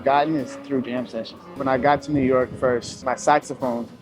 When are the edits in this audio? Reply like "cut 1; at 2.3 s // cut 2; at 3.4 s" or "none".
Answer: cut 1; at 1.6 s // cut 2; at 3.0 s